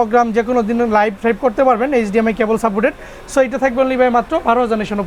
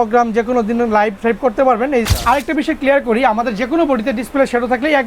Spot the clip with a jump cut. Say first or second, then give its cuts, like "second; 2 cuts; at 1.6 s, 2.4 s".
second; 1 cut; at 2.1 s